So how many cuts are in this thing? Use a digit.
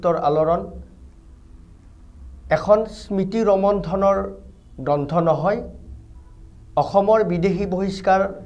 0